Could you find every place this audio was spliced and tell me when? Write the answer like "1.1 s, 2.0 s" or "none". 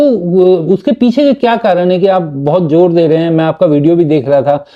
none